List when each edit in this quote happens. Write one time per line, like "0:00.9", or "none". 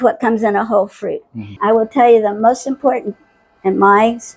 0:01.5